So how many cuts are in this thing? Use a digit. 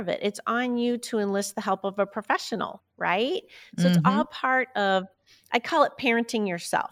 1